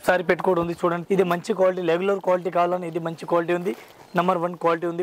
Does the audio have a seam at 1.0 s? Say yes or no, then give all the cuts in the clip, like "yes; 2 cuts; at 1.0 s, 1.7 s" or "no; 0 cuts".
yes; 1 cut; at 1.0 s